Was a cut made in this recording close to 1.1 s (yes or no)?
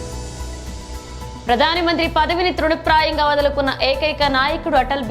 yes